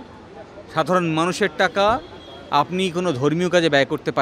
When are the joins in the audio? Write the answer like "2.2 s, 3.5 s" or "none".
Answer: none

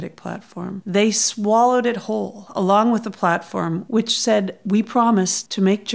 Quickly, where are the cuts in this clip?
3.8 s

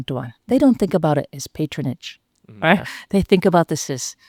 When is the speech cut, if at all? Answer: none

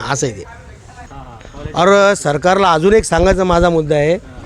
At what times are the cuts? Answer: 1.1 s

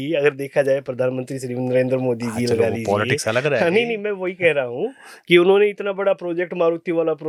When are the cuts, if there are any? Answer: none

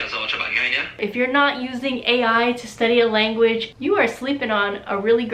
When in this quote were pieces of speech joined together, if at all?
1.0 s, 3.7 s

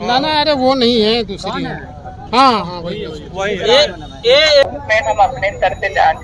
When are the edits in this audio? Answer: 4.6 s

